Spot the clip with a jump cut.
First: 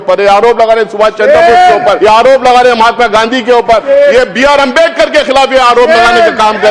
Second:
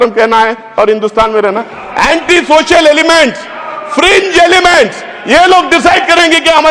first; 2 cuts; at 2.0 s, 3.8 s

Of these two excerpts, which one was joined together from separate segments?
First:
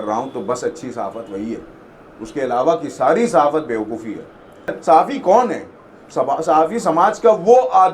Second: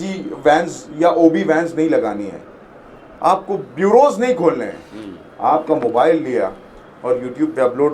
first; 1 cut; at 4.8 s

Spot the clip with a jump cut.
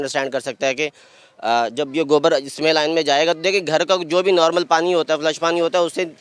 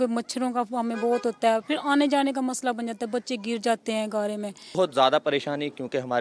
second; 1 cut; at 4.8 s

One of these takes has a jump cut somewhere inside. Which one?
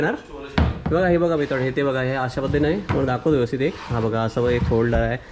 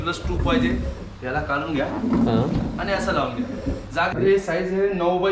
second; 1 cut; at 4.1 s

